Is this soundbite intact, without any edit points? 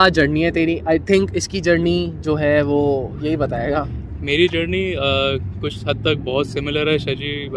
yes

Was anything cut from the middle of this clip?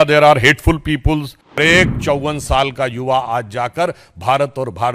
yes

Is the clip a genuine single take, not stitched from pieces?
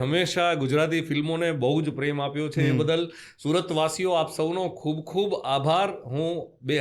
yes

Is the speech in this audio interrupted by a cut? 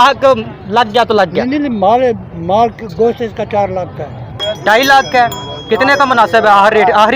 yes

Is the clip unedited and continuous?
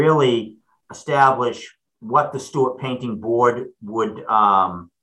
yes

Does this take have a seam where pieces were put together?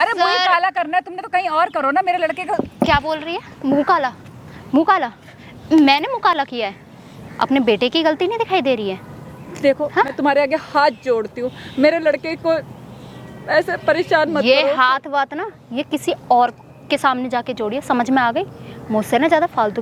no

